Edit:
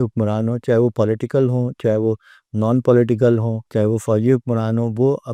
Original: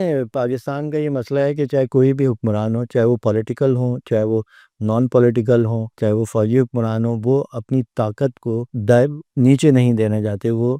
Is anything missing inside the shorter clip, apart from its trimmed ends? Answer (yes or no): no